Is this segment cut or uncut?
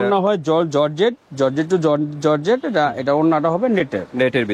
uncut